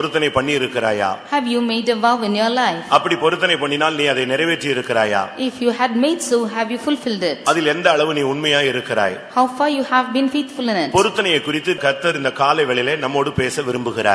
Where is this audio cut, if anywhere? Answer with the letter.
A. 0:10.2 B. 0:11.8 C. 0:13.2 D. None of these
B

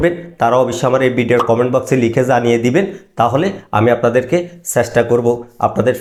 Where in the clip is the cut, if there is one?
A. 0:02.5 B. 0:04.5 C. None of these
C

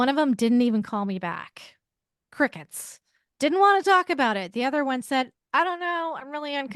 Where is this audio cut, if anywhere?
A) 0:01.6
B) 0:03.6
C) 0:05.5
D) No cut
D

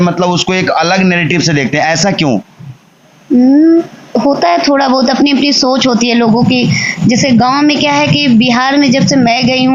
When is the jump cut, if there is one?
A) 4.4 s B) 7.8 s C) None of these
C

